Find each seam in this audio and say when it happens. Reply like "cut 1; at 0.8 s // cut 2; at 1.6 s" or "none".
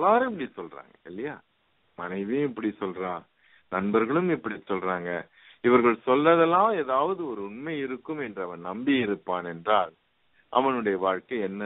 none